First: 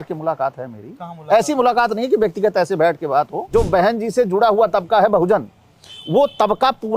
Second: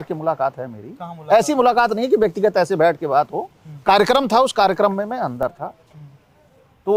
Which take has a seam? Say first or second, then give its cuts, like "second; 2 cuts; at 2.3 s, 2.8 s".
first; 1 cut; at 3.4 s